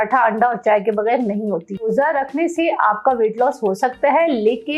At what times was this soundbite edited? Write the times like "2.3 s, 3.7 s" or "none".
1.8 s